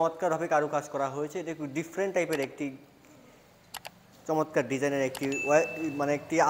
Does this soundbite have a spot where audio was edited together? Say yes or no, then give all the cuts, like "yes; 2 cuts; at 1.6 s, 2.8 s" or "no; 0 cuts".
no; 0 cuts